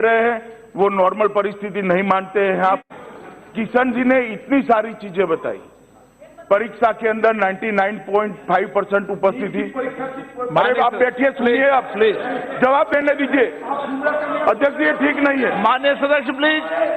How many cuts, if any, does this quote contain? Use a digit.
1